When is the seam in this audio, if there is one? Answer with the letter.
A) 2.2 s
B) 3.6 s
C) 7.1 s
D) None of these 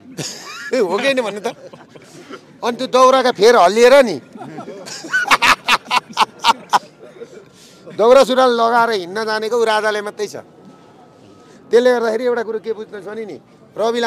D